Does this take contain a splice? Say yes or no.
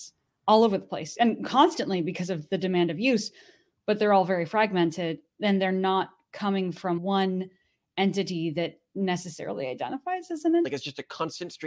yes